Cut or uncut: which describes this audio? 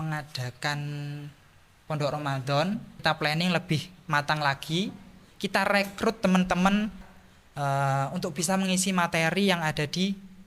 cut